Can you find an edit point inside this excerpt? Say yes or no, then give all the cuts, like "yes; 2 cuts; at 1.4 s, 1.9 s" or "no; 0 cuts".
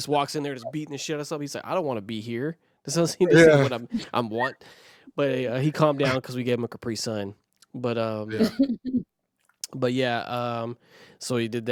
no; 0 cuts